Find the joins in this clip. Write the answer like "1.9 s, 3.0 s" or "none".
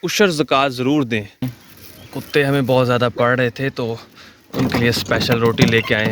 1.5 s